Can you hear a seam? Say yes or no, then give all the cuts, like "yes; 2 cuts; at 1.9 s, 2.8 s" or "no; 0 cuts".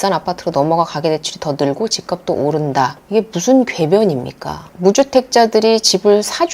yes; 2 cuts; at 3.0 s, 4.7 s